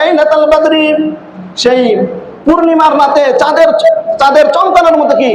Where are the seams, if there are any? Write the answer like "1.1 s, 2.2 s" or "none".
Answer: 2.3 s, 4.1 s